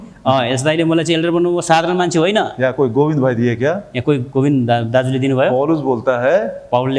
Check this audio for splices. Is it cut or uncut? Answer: uncut